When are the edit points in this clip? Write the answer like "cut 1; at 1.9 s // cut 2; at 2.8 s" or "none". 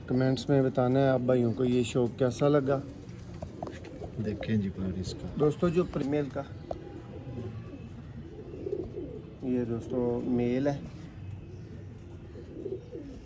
cut 1; at 6.0 s